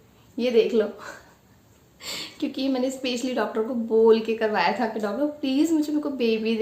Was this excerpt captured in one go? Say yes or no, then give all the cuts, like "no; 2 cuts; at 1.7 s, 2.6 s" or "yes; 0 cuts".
yes; 0 cuts